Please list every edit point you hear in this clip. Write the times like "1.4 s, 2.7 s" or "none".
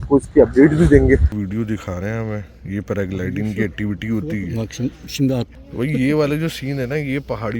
1.3 s, 5.5 s